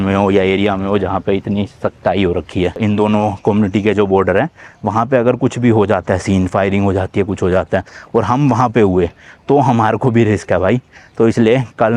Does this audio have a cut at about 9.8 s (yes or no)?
no